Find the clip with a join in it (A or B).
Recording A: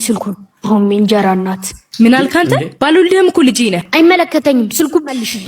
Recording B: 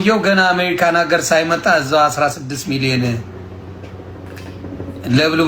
A